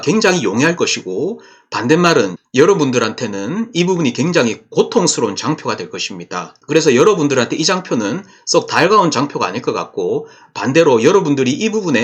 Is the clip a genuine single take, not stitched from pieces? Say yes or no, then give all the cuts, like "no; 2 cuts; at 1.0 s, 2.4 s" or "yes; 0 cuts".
yes; 0 cuts